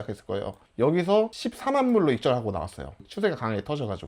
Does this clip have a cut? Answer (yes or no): no